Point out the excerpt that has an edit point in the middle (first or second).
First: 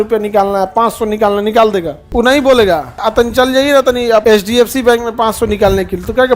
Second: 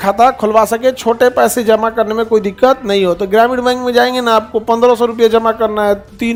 first